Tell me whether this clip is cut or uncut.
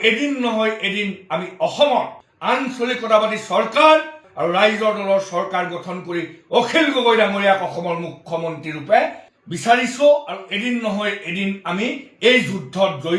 uncut